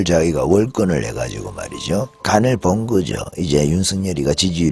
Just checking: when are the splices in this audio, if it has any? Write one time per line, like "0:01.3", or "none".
0:02.1